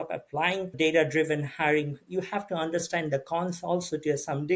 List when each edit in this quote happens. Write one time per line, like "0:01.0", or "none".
0:00.7
0:02.0